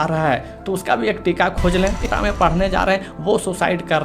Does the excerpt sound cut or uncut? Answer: cut